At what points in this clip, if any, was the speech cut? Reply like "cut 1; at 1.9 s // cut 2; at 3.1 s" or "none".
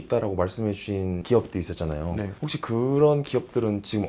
none